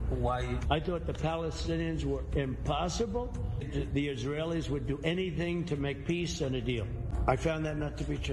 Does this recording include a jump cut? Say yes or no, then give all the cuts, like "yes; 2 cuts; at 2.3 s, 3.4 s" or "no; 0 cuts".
yes; 2 cuts; at 3.7 s, 7.1 s